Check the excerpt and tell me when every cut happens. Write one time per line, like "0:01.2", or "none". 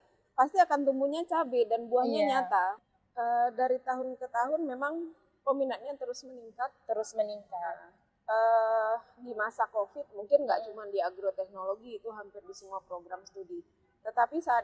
0:02.8